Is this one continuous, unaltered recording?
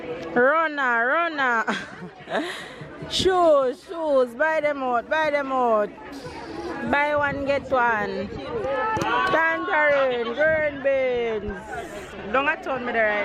yes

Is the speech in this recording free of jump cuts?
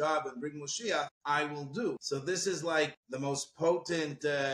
no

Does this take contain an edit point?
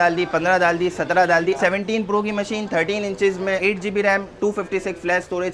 yes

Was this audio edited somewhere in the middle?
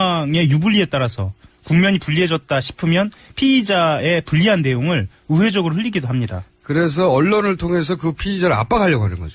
yes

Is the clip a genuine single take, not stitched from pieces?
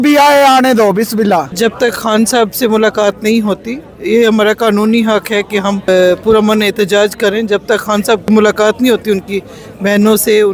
no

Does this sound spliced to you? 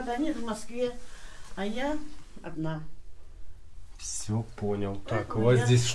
no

